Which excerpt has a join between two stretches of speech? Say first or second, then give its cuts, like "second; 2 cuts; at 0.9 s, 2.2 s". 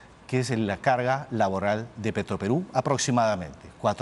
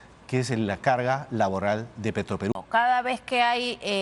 second; 1 cut; at 2.5 s